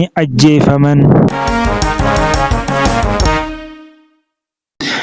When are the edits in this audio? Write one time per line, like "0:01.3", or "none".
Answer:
0:01.3